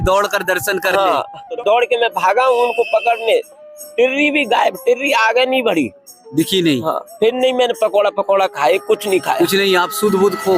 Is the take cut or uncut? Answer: cut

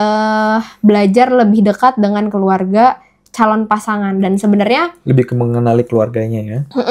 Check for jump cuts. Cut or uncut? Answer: uncut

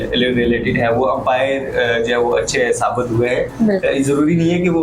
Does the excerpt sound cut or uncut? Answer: uncut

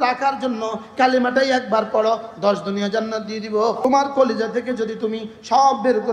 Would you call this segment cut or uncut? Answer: cut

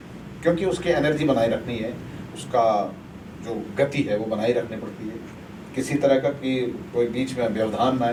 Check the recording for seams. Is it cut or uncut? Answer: uncut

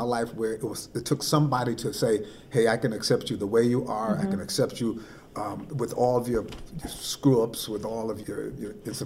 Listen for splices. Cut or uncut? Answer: uncut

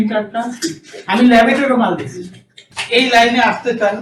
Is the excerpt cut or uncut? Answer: cut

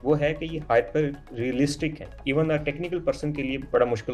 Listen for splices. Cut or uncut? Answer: cut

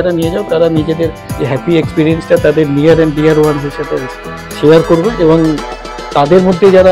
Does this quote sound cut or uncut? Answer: cut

